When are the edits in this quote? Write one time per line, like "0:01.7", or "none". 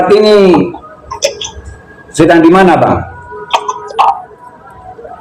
0:03.8

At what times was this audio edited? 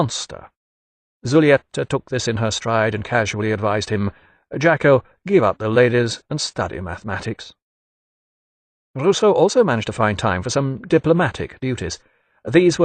0:10.1

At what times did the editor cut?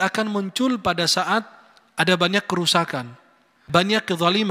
0:03.6

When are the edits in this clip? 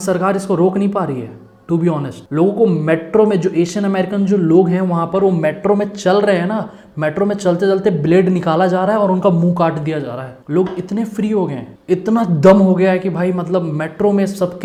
none

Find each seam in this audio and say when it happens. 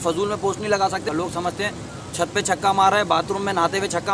0:01.0

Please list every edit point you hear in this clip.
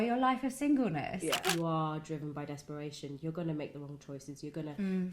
0:01.3

